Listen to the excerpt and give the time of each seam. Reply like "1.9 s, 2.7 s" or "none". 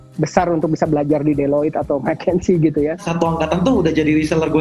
3.1 s